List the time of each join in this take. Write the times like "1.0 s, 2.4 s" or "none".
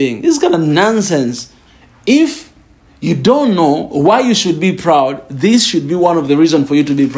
1.6 s